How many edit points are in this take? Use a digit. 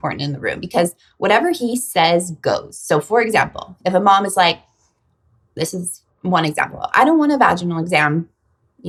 0